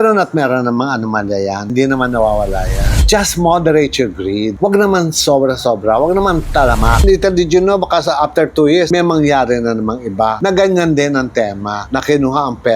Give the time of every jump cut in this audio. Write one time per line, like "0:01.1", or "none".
0:03.0
0:07.0

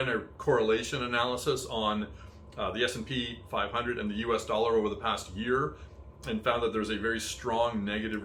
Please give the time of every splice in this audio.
none

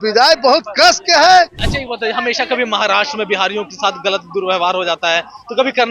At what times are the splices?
0:01.6

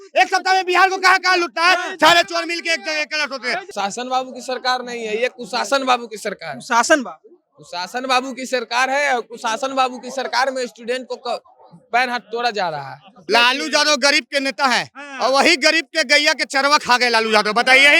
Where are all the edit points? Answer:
0:03.7
0:13.1

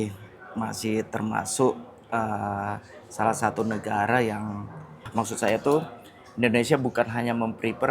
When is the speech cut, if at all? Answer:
0:05.1

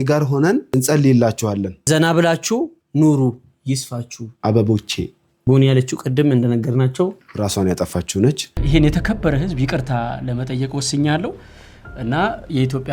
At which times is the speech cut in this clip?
0:08.5

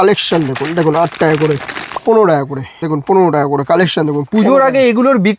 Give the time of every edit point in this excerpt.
0:02.0
0:02.7
0:04.3

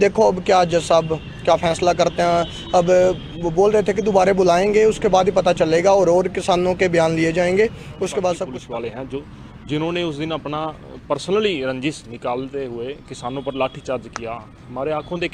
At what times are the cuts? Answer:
0:08.5

